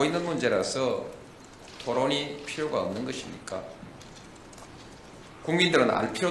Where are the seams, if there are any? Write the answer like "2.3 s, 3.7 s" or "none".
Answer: none

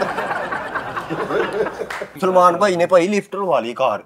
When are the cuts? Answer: 2.1 s

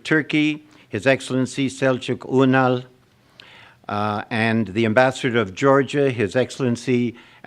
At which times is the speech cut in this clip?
5.6 s

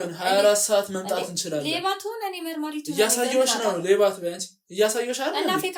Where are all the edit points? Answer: none

